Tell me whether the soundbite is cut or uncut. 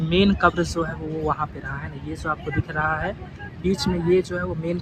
uncut